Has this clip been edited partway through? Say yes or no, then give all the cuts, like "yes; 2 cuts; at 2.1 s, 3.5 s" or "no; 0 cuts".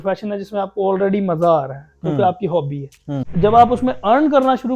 yes; 1 cut; at 3.3 s